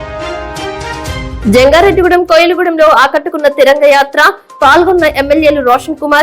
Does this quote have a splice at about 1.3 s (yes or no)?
yes